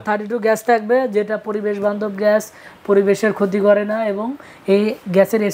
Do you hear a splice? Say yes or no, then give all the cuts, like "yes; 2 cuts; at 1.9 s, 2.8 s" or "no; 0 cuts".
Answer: no; 0 cuts